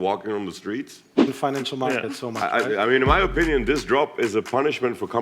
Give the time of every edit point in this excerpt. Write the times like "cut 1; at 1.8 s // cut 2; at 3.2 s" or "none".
cut 1; at 1.3 s